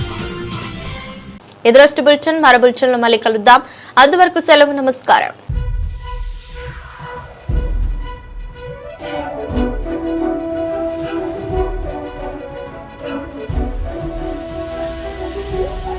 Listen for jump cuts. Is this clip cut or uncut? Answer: uncut